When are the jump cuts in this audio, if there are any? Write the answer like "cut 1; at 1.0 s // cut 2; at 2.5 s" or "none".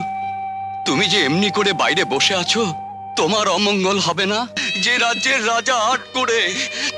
cut 1; at 4.6 s